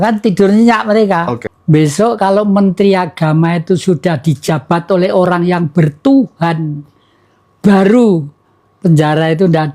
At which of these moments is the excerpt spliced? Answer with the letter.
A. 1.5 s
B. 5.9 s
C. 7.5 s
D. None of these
A